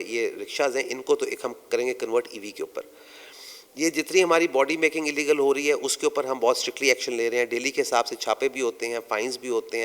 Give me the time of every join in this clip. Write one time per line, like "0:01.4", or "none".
none